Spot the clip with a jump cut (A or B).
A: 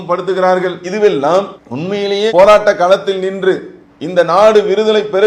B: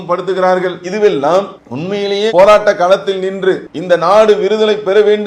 B